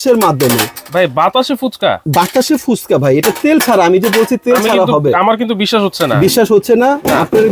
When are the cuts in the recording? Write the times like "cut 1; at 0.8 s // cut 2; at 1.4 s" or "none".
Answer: none